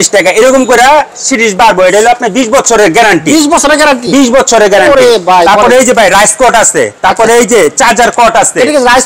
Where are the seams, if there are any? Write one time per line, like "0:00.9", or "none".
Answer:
none